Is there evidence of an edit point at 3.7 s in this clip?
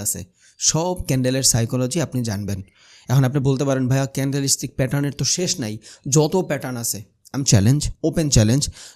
no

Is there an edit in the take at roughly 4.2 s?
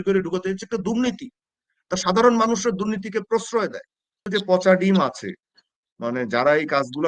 yes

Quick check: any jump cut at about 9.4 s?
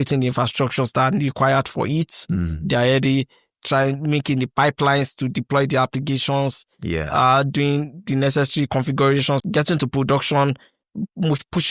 yes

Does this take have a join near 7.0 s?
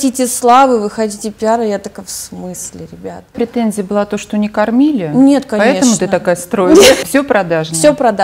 yes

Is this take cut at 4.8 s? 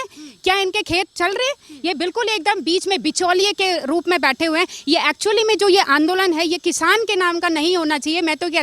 no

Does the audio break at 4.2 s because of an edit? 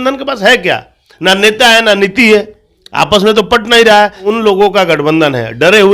yes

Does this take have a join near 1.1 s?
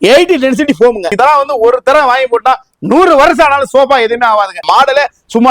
yes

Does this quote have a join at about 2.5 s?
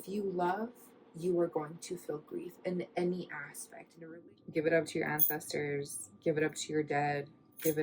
no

